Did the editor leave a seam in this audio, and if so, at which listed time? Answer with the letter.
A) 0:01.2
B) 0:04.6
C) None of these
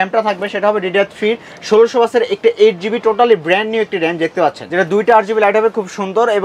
B